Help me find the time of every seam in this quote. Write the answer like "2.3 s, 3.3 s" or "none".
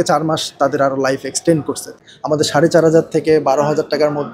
2.0 s

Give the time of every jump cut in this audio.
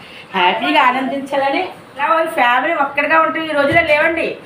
2.0 s

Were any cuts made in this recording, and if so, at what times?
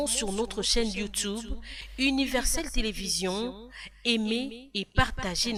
none

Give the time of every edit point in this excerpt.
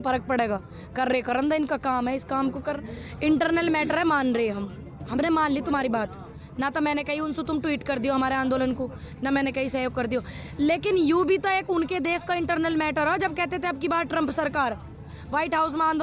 2.7 s

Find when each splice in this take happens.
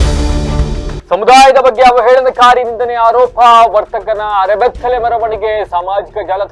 0.9 s

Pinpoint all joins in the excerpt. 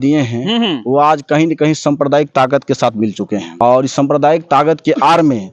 3.5 s

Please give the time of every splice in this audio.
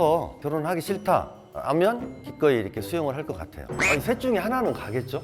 none

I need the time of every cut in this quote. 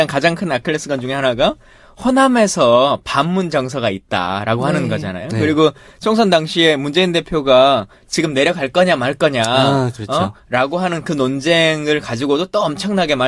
1.6 s

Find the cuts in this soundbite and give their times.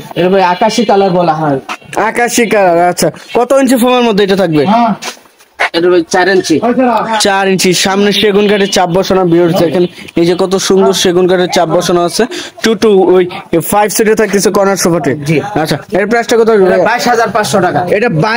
none

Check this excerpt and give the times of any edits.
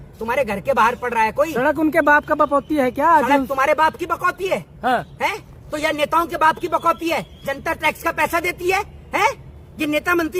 none

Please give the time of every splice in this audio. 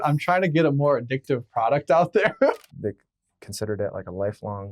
2.6 s

